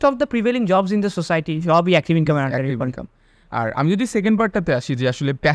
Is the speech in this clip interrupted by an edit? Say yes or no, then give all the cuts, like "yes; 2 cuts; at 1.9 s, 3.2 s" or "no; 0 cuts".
no; 0 cuts